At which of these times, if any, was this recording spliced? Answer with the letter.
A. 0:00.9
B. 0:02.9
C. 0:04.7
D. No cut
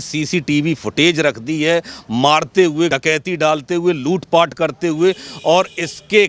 B